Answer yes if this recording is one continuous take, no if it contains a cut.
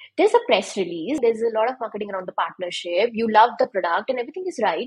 no